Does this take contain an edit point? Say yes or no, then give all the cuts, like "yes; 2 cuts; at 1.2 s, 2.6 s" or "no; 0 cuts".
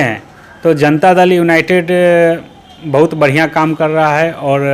no; 0 cuts